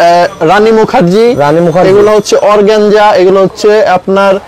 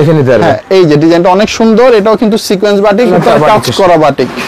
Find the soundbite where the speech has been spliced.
second; 1 cut; at 3.1 s

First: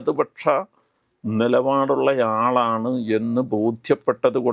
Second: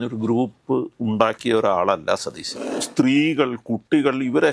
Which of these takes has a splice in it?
second; 1 cut; at 2.8 s

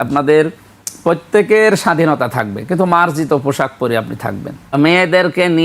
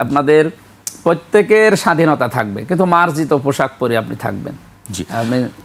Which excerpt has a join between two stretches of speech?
first; 1 cut; at 4.7 s

